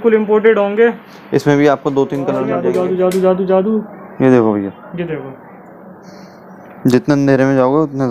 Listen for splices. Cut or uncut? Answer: cut